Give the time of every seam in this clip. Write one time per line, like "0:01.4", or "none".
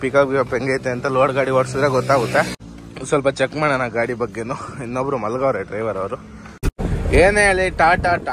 0:02.6
0:06.7